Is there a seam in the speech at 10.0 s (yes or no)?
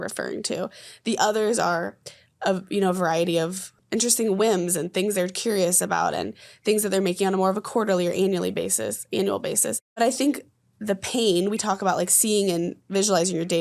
yes